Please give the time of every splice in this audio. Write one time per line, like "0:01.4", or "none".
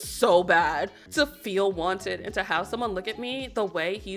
0:01.0